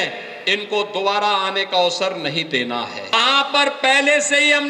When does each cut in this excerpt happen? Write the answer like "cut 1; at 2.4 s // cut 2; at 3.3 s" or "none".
cut 1; at 3.1 s